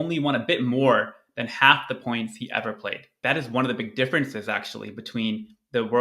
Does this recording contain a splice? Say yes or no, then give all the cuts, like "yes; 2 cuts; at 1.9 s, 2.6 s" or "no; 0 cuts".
yes; 1 cut; at 3.2 s